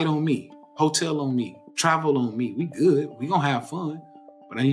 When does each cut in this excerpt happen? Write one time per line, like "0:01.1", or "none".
0:01.6